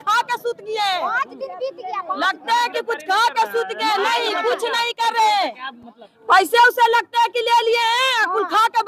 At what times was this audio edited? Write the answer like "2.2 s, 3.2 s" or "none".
none